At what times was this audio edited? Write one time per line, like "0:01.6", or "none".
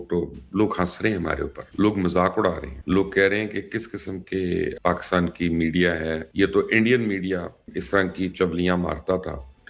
0:01.6
0:02.7
0:04.7
0:06.2

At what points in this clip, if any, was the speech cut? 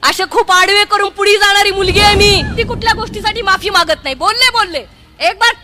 0:02.5

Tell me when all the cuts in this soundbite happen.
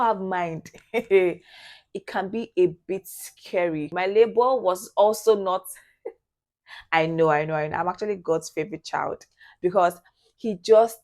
0:03.9

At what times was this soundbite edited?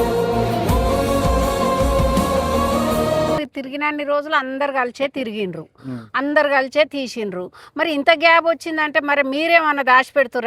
0:03.5

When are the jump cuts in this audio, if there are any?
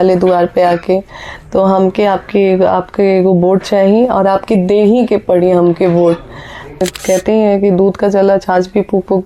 0:06.8

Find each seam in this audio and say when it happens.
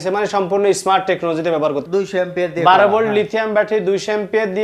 0:01.8

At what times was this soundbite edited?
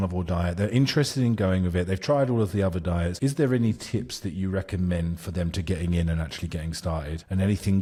none

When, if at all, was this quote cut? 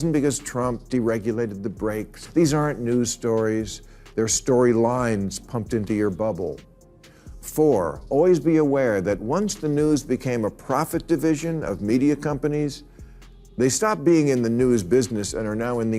0:02.2

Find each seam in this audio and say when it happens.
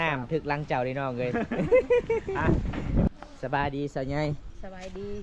0:03.1

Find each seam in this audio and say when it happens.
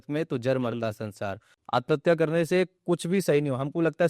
0:01.5

